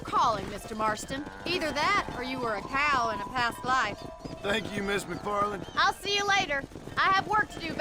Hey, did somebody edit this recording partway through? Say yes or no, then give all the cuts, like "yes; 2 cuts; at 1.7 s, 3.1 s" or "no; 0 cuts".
no; 0 cuts